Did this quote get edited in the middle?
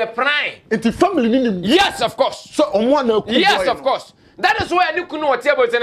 no; 0 cuts

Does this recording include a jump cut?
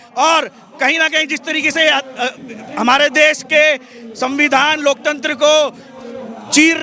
no; 0 cuts

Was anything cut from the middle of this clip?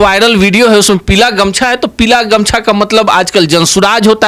no; 0 cuts

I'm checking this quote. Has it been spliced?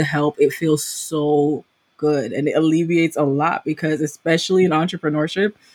no; 0 cuts

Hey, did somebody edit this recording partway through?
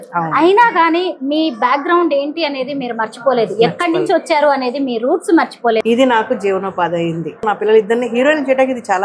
yes; 2 cuts; at 5.8 s, 7.4 s

